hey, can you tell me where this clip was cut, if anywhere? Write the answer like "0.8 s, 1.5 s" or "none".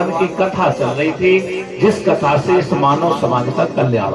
none